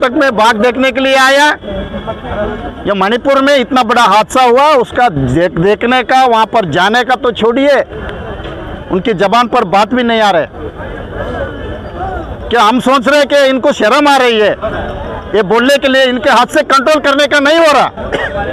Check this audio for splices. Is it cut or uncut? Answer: uncut